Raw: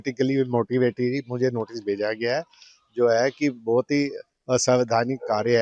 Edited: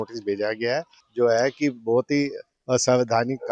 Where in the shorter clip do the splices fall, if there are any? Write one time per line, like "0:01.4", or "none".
0:01.0